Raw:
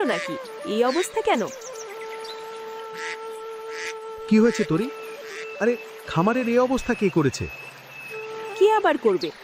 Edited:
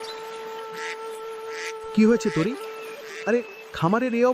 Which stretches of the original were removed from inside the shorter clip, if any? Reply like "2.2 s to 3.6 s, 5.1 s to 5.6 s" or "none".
4.1 s to 4.2 s